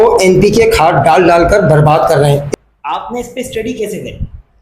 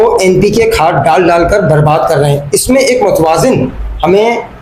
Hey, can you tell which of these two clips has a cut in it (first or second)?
first